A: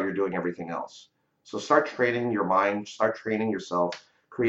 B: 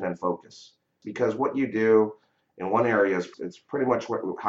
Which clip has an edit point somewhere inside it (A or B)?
B